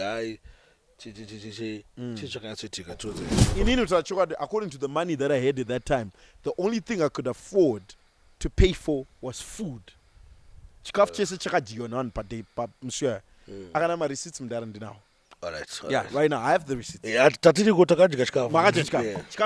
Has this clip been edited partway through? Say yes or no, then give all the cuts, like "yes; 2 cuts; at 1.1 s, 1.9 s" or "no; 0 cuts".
yes; 1 cut; at 3.4 s